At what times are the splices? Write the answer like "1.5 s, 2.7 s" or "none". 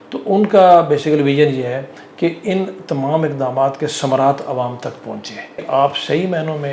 5.6 s